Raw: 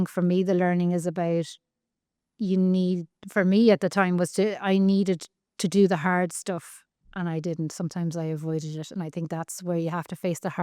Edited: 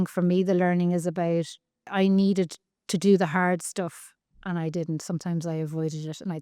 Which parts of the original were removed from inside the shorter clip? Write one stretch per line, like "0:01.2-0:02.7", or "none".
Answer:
0:01.9-0:04.6